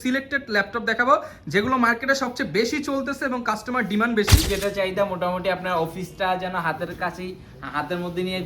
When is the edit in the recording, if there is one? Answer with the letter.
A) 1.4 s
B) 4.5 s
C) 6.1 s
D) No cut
B